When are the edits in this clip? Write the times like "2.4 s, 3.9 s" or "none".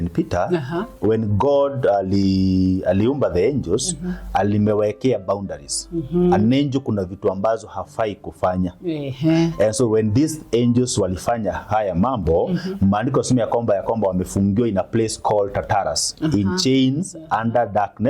none